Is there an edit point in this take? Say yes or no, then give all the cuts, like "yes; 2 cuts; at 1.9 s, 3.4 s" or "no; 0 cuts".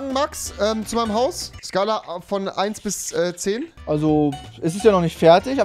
no; 0 cuts